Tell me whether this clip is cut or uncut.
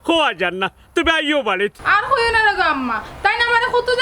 cut